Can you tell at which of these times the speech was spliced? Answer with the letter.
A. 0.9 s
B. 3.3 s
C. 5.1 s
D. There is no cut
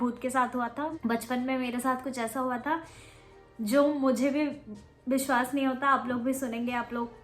A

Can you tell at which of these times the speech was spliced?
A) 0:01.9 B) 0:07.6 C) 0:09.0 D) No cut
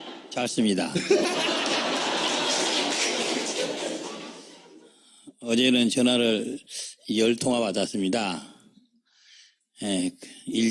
A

